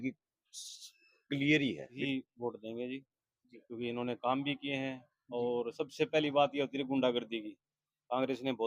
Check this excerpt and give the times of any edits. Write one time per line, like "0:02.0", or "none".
0:01.9